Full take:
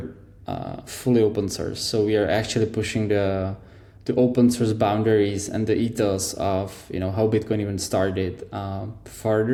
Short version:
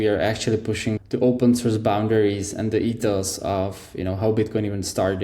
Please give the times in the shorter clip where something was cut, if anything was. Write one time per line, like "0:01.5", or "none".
0:01.0